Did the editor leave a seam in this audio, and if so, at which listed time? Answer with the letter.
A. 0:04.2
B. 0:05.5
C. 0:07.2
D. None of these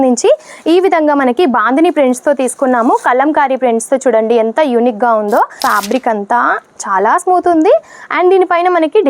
B